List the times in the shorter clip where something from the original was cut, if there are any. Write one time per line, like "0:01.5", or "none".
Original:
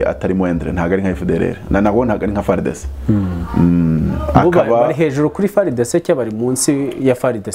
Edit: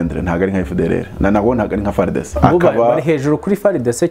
0:02.3